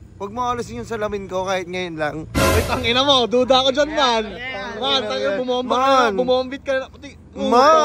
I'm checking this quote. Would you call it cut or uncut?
uncut